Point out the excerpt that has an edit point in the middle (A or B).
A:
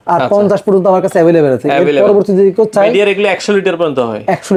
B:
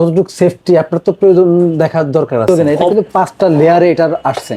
B